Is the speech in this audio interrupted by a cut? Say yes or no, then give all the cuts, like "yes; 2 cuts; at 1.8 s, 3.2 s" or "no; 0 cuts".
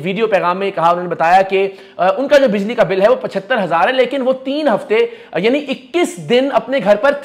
no; 0 cuts